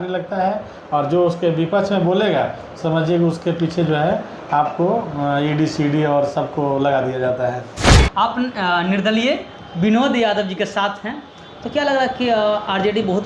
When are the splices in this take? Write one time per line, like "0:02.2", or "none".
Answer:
0:07.8